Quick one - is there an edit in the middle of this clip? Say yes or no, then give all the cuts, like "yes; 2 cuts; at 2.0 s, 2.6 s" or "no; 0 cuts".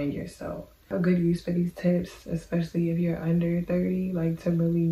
yes; 1 cut; at 0.9 s